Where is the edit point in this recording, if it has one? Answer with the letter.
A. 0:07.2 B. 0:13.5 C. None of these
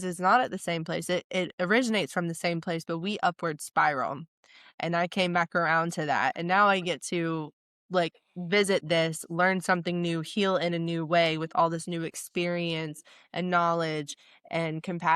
C